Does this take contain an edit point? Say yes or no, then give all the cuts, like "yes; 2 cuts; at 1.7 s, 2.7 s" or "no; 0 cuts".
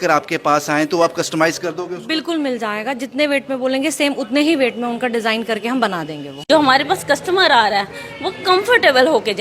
yes; 1 cut; at 6.3 s